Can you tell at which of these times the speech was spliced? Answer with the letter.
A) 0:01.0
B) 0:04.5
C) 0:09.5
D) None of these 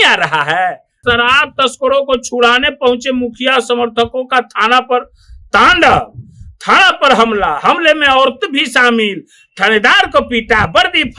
A